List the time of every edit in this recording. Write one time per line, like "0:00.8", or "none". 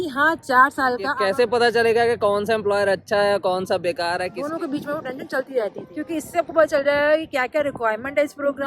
0:01.1
0:04.4
0:05.9